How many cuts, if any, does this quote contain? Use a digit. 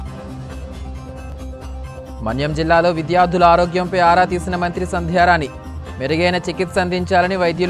1